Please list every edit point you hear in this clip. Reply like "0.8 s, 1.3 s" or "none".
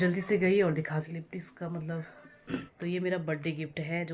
1.0 s, 2.7 s